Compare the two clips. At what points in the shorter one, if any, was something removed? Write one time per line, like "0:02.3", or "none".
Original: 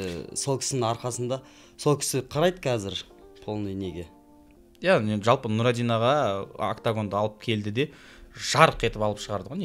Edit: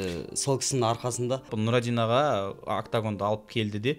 0:01.5